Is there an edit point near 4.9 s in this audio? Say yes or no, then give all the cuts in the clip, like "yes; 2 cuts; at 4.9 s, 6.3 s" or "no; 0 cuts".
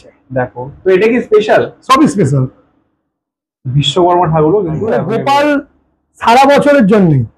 yes; 1 cut; at 4.9 s